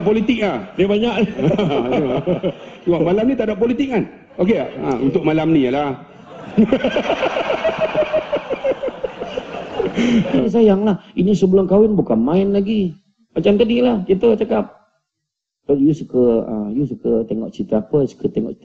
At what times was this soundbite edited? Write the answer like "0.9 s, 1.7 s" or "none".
10.4 s